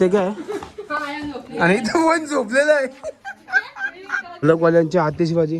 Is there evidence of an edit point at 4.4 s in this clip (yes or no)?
yes